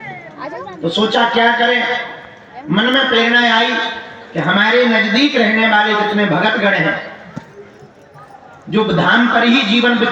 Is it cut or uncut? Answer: uncut